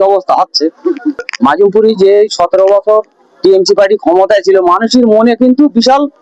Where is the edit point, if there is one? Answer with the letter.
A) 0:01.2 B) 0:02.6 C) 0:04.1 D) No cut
A